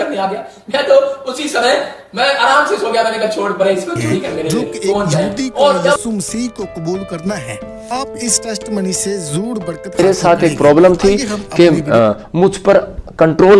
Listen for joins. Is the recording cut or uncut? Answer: cut